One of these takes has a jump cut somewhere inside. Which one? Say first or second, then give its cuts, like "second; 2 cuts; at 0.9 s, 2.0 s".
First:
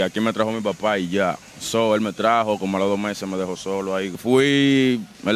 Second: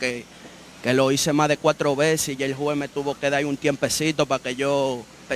first; 1 cut; at 4.2 s